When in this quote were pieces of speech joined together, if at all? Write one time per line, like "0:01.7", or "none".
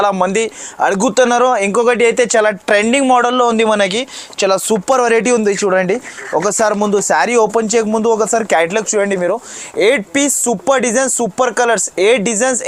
none